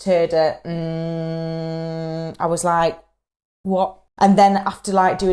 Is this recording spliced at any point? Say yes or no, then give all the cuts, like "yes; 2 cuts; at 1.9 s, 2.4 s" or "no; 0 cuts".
yes; 1 cut; at 4.0 s